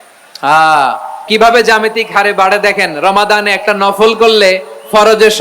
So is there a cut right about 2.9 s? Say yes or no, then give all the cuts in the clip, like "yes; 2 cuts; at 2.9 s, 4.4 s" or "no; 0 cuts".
no; 1 cut; at 1.2 s